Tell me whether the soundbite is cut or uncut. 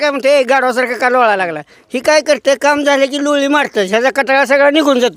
uncut